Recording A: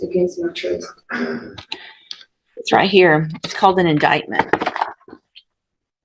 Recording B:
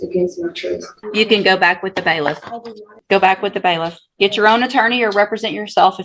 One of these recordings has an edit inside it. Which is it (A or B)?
B